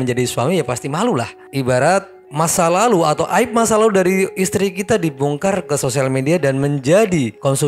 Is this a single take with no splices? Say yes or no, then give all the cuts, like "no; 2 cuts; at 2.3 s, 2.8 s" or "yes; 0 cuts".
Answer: yes; 0 cuts